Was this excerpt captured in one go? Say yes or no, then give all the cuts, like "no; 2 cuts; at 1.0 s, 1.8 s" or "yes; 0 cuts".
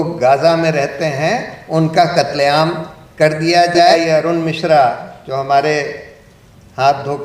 no; 1 cut; at 3.9 s